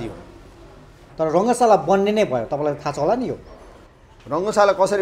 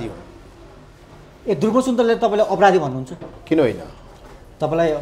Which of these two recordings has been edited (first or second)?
first